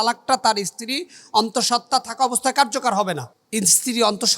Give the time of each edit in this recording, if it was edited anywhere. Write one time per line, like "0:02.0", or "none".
0:03.3